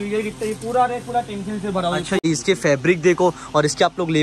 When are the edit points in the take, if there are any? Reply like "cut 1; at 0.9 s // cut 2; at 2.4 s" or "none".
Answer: cut 1; at 2.2 s